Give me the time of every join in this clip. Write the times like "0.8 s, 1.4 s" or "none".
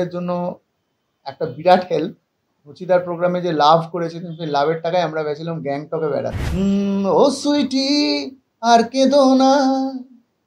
6.4 s